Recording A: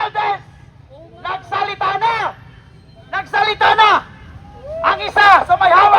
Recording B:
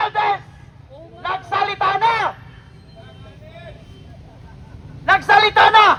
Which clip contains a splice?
A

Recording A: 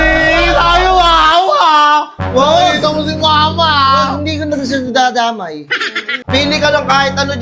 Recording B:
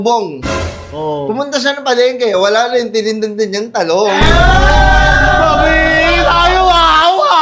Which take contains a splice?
A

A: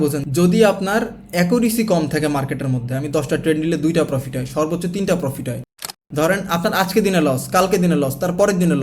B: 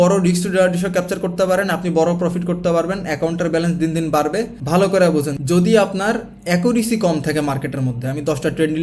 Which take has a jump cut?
A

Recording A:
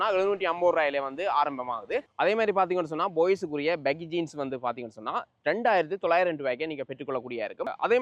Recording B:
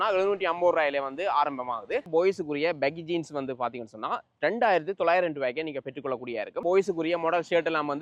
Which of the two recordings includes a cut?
B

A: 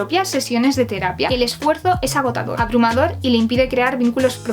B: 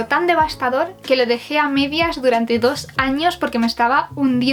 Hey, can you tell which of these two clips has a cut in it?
A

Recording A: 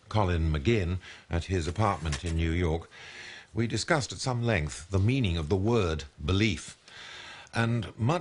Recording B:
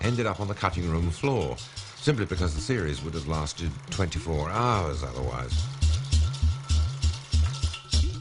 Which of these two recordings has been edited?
B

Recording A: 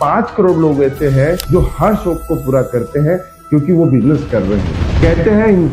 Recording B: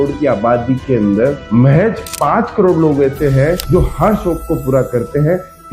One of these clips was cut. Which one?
A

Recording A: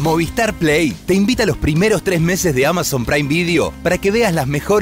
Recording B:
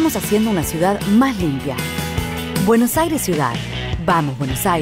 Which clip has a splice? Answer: B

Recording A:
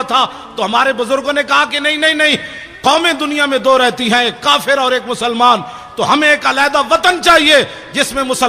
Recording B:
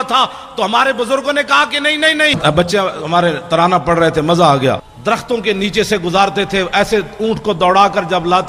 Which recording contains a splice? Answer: B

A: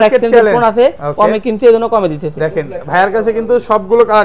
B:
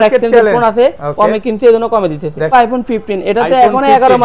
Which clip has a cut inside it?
B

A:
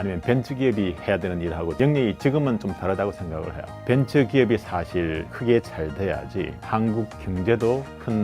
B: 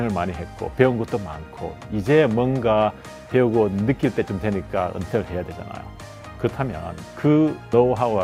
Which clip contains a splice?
A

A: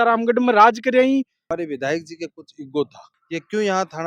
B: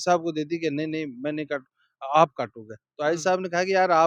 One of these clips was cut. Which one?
A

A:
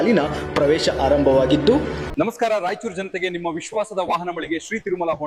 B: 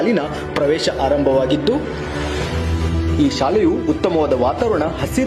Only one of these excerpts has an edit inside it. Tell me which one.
A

